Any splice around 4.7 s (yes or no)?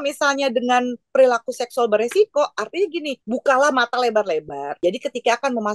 yes